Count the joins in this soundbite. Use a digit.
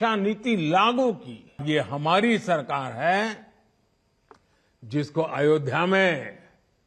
1